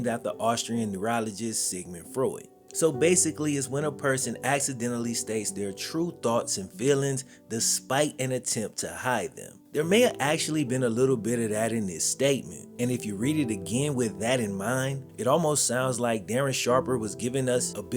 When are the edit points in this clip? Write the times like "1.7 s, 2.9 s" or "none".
2.6 s